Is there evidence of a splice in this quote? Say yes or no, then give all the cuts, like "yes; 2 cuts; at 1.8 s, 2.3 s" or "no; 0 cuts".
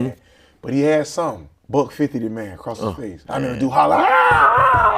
yes; 2 cuts; at 1.5 s, 3.2 s